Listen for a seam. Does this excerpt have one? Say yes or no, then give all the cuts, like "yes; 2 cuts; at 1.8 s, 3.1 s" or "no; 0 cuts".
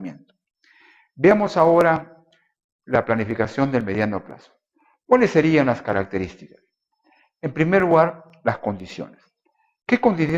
yes; 1 cut; at 2.8 s